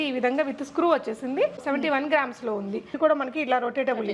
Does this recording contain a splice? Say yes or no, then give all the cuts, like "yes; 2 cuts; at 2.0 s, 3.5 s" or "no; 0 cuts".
yes; 1 cut; at 2.9 s